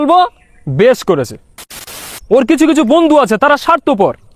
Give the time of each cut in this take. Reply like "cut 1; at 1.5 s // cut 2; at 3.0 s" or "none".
cut 1; at 1.8 s